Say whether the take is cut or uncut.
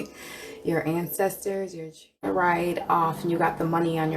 cut